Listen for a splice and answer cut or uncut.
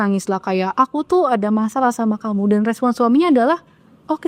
uncut